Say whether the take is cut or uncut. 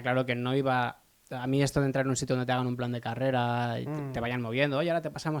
uncut